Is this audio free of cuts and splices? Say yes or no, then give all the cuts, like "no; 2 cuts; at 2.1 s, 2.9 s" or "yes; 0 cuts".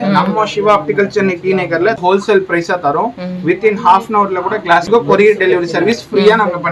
no; 2 cuts; at 2.1 s, 4.9 s